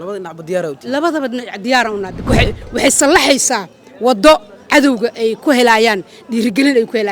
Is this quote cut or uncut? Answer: cut